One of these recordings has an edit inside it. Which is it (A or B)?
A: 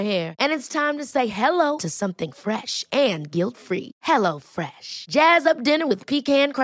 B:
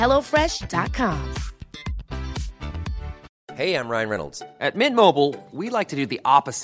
B